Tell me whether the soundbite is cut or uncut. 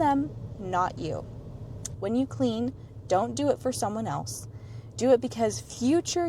cut